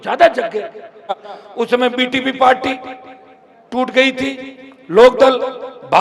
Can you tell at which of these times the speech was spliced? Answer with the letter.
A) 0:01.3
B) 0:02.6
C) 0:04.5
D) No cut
A